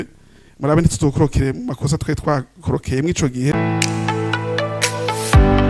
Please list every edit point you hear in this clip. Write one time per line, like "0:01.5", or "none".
0:03.5